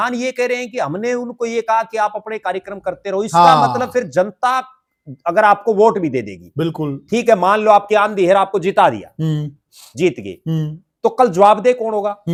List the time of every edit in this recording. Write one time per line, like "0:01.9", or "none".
none